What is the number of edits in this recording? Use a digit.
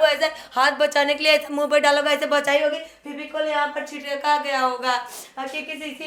0